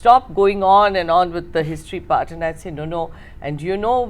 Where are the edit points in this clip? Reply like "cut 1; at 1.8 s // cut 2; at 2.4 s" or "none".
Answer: none